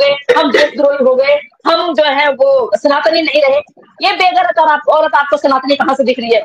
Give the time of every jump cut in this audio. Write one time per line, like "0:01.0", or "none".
none